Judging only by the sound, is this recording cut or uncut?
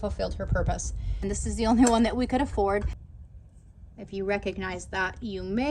cut